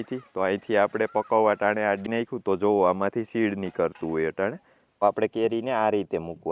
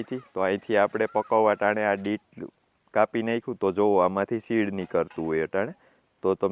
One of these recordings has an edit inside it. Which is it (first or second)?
first